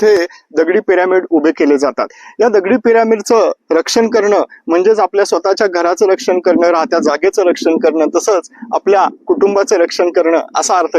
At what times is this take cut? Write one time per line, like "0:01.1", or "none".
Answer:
none